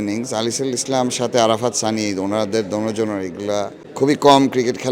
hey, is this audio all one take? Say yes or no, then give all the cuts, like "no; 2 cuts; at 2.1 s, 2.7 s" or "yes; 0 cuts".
no; 1 cut; at 3.8 s